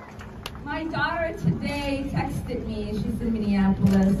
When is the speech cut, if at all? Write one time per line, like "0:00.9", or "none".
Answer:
none